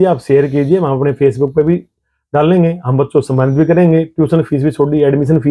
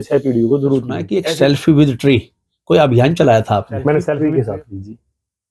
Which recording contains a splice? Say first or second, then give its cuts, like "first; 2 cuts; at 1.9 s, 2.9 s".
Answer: second; 2 cuts; at 1.0 s, 4.1 s